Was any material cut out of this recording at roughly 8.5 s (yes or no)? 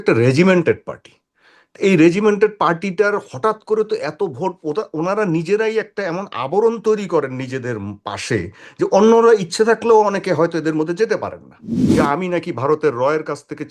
no